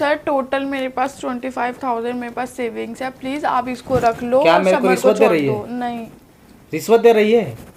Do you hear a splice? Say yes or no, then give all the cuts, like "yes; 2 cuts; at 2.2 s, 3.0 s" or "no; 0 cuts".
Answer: no; 0 cuts